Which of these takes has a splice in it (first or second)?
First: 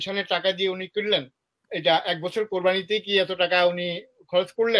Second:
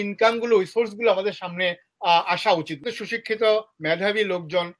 second